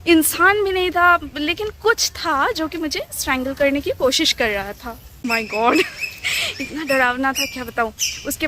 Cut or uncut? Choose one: cut